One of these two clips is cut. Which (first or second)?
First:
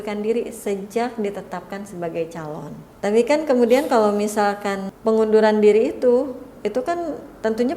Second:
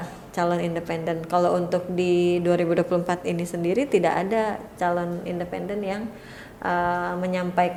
first